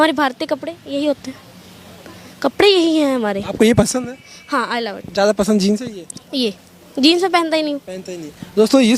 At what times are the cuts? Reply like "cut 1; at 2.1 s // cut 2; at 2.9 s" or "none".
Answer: none

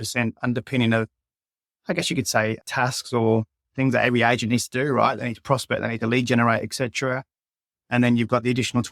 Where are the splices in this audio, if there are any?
none

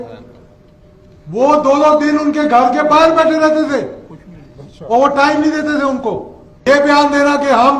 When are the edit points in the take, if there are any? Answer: cut 1; at 6.7 s

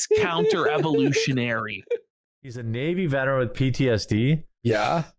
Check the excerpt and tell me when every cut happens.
cut 1; at 2.6 s

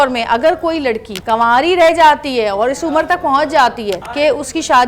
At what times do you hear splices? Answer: cut 1; at 1.1 s // cut 2; at 4.0 s

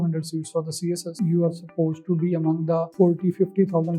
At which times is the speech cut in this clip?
cut 1; at 1.1 s // cut 2; at 2.9 s

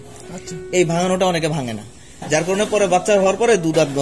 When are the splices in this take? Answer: none

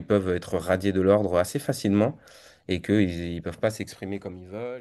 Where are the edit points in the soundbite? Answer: none

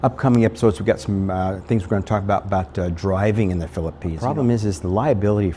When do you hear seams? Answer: cut 1; at 4.0 s

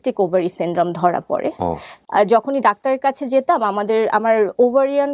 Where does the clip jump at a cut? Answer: cut 1; at 1.9 s

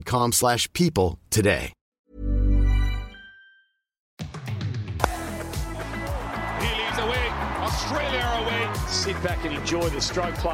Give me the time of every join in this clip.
cut 1; at 2.1 s // cut 2; at 4.3 s

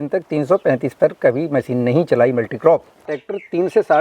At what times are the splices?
cut 1; at 3.1 s

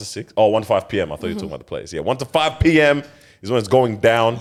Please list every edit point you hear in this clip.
none

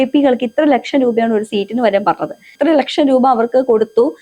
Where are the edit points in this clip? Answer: cut 1; at 2.5 s

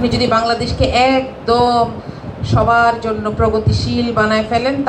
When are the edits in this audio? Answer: none

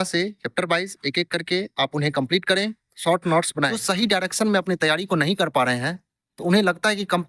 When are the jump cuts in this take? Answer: cut 1; at 2.9 s // cut 2; at 3.8 s

